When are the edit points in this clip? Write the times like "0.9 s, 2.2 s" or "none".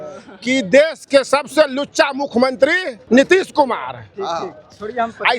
3.0 s